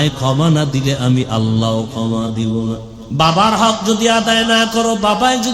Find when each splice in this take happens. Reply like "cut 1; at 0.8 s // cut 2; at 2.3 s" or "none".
cut 1; at 2.9 s